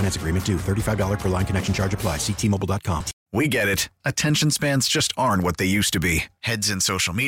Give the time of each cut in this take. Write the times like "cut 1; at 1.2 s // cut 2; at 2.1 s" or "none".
cut 1; at 3.2 s